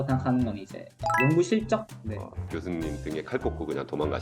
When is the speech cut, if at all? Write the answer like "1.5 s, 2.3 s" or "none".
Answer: 2.0 s